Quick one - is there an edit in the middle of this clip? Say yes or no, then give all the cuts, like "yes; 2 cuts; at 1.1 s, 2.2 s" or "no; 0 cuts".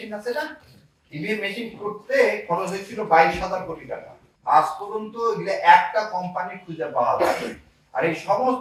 no; 0 cuts